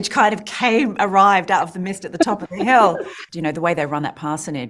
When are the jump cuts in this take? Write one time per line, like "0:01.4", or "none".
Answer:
0:03.2

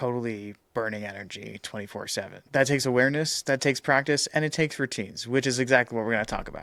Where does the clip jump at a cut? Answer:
none

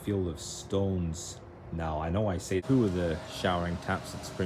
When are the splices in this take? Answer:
0:02.6

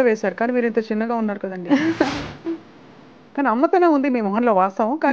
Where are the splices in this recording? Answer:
0:03.1

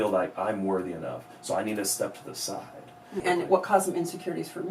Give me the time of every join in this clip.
0:03.2

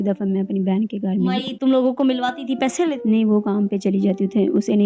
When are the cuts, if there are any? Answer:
0:01.5
0:03.0

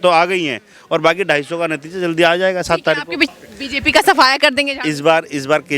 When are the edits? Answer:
0:03.3

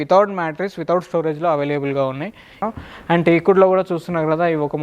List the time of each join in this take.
0:02.5

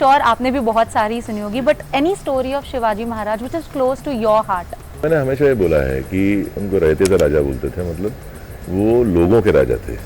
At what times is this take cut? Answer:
none

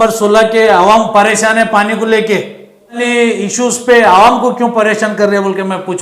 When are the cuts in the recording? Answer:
0:03.0

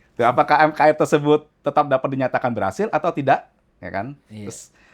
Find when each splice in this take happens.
none

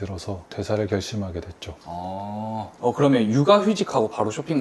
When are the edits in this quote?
0:02.7

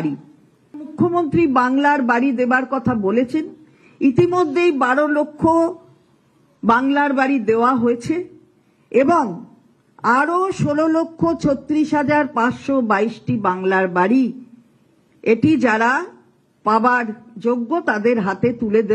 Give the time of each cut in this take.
0:00.9

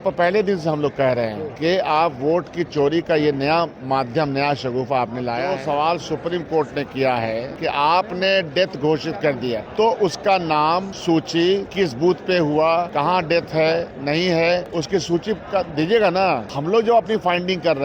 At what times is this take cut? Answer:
0:01.5
0:05.5
0:07.5
0:09.6
0:10.9
0:11.7
0:12.9
0:14.7
0:16.5

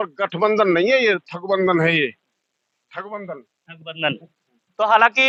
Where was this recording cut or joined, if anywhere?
none

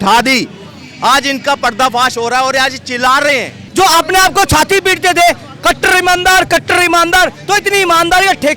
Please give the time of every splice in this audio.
0:03.6

